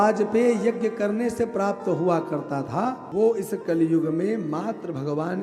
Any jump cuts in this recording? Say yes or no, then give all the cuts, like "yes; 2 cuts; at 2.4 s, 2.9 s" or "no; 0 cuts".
yes; 1 cut; at 3.0 s